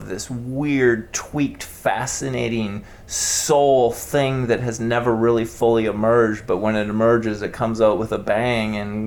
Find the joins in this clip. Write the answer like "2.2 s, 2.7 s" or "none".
none